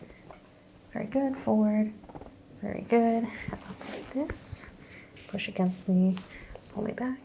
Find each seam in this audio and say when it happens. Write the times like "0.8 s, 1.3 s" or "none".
none